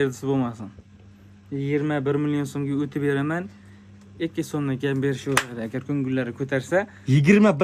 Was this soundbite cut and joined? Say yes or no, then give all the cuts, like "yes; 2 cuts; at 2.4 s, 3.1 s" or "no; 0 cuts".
no; 0 cuts